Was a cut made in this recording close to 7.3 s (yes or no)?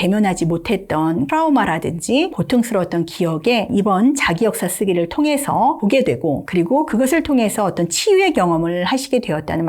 no